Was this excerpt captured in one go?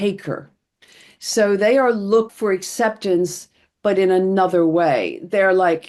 no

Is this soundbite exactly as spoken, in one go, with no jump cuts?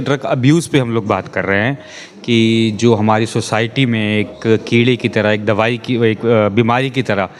yes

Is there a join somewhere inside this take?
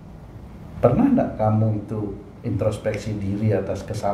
no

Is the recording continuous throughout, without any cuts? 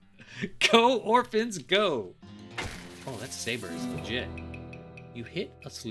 no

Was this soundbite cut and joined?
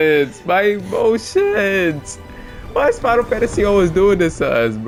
no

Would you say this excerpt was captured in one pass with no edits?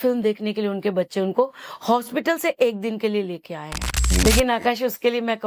no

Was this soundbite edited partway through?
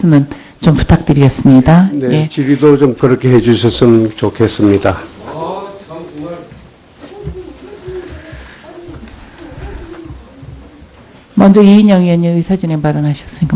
no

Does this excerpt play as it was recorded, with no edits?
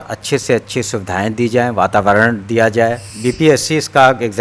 no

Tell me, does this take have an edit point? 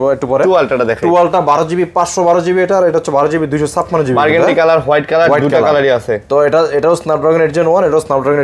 no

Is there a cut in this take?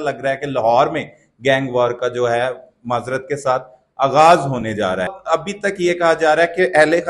yes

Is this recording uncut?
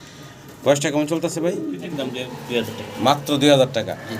no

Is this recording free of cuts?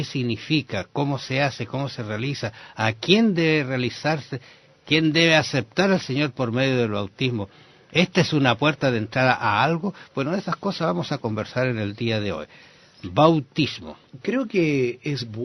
no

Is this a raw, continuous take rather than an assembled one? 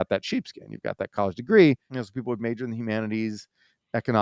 no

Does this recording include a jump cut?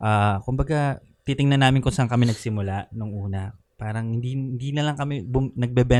no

